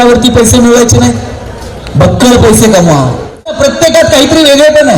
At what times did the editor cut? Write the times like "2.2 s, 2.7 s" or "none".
3.6 s